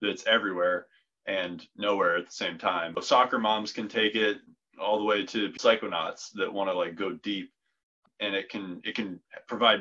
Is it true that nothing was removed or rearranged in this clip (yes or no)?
no